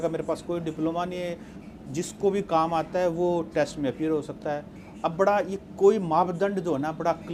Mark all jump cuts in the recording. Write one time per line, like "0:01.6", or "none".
none